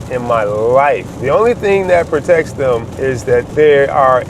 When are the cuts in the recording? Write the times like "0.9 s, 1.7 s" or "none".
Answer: 1.1 s, 3.3 s